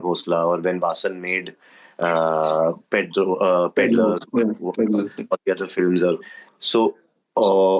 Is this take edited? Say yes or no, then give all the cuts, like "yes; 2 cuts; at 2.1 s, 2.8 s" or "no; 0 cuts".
no; 0 cuts